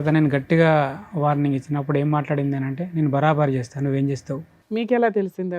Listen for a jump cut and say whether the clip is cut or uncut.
cut